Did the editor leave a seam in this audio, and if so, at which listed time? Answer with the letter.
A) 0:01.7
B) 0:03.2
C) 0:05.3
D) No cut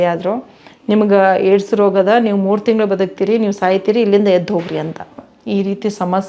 C